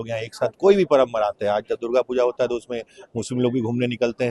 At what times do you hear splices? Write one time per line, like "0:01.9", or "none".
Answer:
none